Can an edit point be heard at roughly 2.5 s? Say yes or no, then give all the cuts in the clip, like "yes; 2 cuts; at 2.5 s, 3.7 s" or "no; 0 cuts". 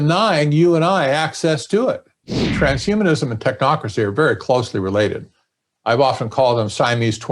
yes; 1 cut; at 2.5 s